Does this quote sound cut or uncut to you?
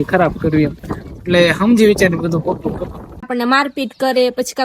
cut